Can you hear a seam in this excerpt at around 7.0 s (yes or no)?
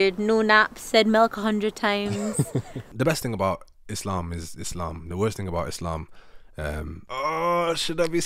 yes